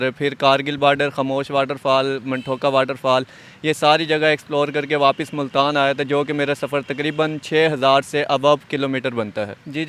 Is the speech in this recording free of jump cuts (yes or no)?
yes